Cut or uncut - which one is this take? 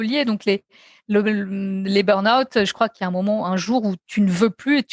cut